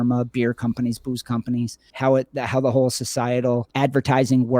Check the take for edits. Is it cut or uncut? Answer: cut